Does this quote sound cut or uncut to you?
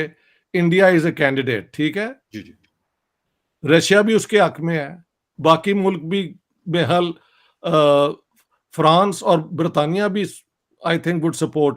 uncut